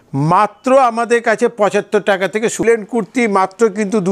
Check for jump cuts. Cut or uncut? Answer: cut